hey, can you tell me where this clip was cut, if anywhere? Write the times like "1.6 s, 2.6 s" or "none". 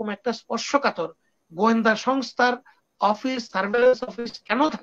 none